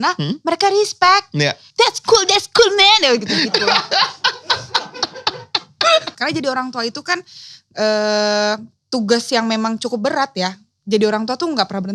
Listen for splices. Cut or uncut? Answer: cut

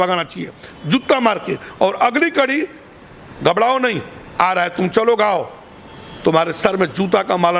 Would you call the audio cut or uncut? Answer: uncut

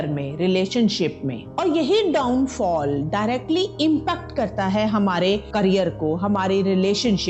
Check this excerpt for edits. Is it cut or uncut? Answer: cut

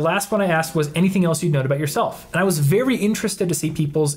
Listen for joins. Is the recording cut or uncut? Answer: uncut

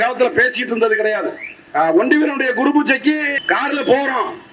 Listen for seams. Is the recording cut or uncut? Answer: cut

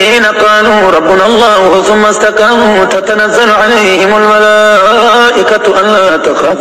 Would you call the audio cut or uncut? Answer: uncut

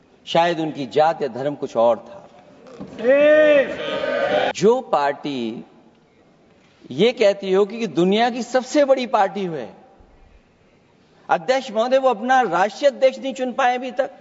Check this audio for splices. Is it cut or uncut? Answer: cut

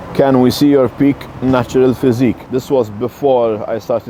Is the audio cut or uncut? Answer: uncut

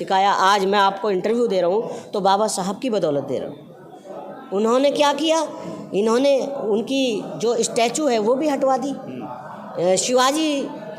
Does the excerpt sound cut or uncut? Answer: uncut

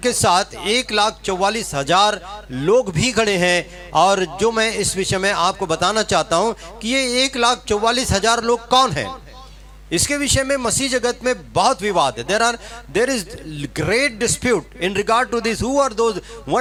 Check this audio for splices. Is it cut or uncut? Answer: uncut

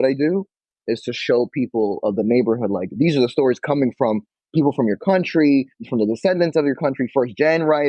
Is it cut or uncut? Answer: uncut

